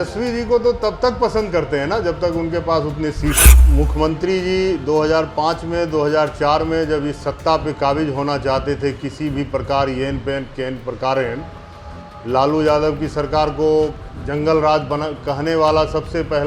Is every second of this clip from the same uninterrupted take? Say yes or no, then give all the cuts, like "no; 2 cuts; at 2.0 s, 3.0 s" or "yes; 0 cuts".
no; 1 cut; at 3.5 s